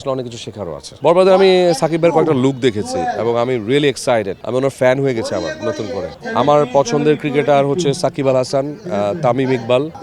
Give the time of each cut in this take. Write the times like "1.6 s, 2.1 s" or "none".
0.9 s, 4.4 s, 6.1 s